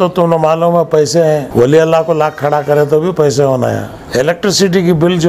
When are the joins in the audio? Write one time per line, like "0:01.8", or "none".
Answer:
0:01.5
0:03.9

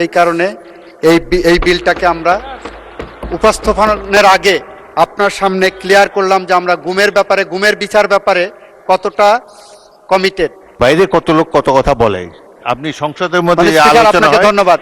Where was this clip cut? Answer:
0:10.8

